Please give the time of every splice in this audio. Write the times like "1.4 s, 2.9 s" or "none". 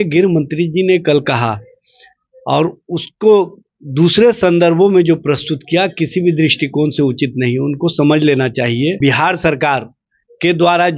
9.0 s